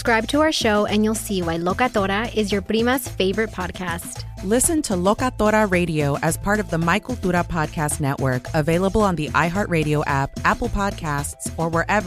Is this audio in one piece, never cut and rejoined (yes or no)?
yes